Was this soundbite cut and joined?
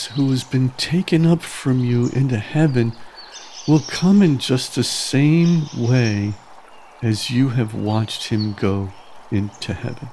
no; 0 cuts

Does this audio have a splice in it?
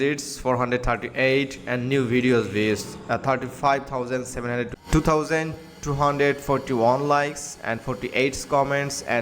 yes; 1 cut; at 4.7 s

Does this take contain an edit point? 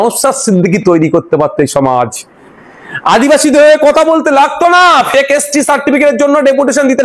no; 0 cuts

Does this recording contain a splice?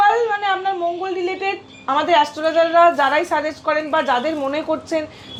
no; 0 cuts

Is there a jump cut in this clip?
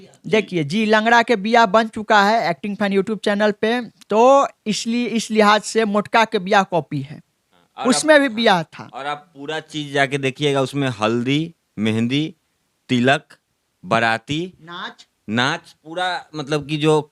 no; 0 cuts

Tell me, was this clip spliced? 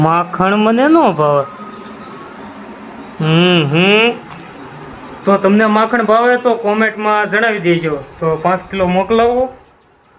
no; 0 cuts

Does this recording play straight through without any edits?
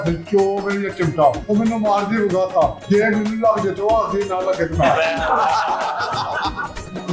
no; 2 cuts; at 1.4 s, 2.8 s

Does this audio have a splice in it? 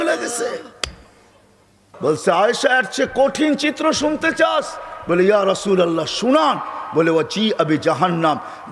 yes; 1 cut; at 1.8 s

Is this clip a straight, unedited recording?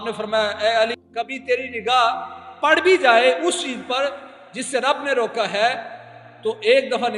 no; 1 cut; at 1.0 s

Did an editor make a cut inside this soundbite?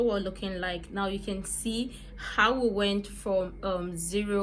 no; 0 cuts

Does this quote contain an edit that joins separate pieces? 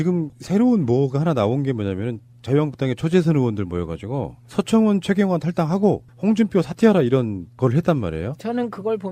no; 0 cuts

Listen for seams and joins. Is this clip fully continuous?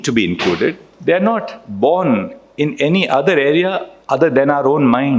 no; 2 cuts; at 0.9 s, 3.9 s

